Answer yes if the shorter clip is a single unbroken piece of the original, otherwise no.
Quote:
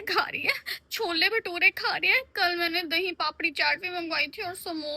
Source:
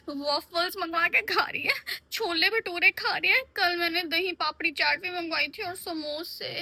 yes